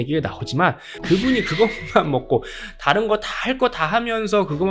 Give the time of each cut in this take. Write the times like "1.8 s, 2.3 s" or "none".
0.9 s